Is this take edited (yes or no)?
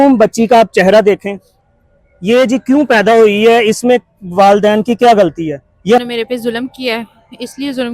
yes